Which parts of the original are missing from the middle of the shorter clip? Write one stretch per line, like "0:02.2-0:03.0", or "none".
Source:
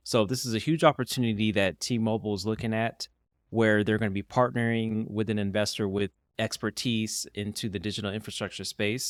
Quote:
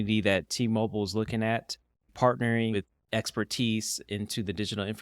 0:03.4-0:04.2
0:04.9-0:06.0